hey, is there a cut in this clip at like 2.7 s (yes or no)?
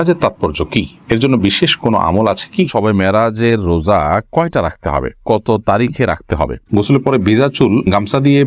yes